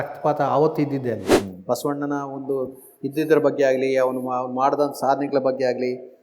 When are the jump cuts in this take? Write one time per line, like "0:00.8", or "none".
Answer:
0:01.3